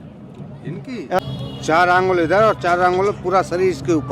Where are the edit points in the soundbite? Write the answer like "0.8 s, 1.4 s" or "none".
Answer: 1.2 s